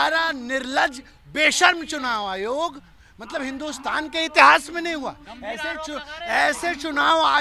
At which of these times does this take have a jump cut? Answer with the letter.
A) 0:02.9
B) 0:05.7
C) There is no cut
C